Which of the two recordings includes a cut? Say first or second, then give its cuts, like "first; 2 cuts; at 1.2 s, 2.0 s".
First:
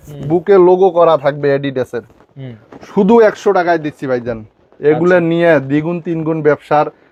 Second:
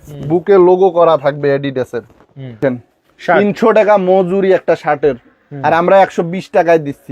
second; 1 cut; at 2.6 s